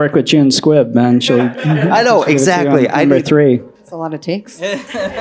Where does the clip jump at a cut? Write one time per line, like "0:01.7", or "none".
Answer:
0:03.8